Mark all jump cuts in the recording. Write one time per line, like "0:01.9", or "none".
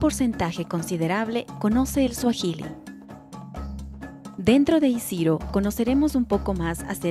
none